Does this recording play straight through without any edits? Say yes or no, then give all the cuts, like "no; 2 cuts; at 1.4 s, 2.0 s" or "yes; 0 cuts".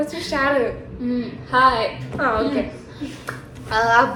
yes; 0 cuts